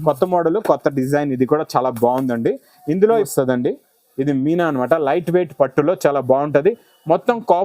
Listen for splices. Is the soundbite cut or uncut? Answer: cut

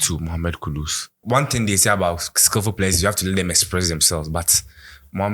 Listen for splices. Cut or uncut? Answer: cut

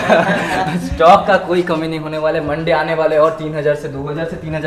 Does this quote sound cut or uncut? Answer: uncut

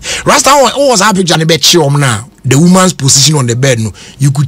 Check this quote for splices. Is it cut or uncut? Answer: cut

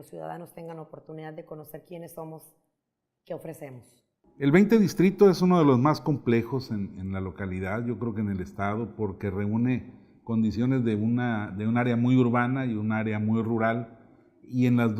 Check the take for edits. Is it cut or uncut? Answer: cut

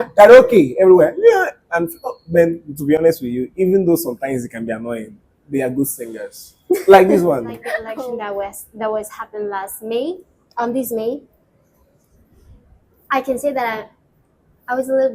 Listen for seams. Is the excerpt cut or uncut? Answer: cut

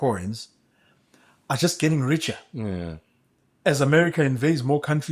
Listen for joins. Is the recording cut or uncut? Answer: uncut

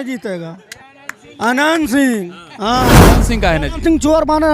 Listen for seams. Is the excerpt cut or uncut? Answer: cut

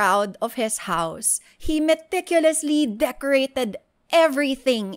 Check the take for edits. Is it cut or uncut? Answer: uncut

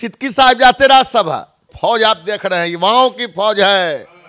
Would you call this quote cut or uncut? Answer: cut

